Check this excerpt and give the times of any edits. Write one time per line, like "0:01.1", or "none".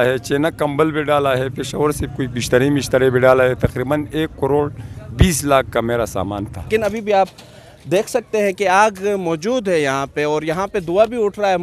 0:06.7

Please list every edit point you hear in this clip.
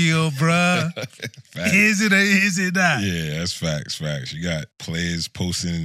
0:04.8

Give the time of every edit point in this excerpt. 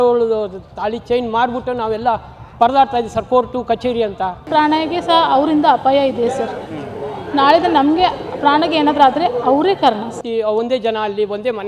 0:04.5
0:10.2

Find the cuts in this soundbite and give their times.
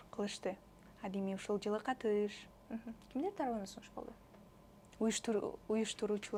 none

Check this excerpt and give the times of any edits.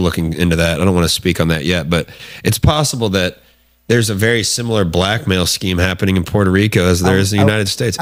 none

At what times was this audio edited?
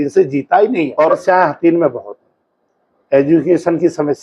0:01.2

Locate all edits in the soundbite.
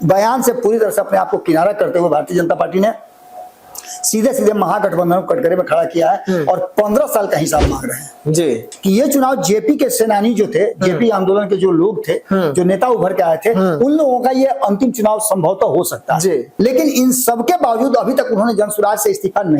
0:08.7
0:16.5

